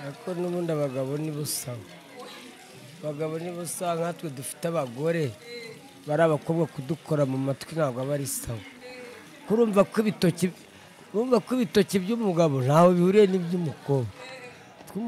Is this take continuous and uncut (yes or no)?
yes